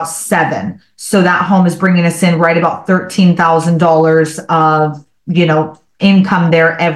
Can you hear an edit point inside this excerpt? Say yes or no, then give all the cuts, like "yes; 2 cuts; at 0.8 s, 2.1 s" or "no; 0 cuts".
no; 0 cuts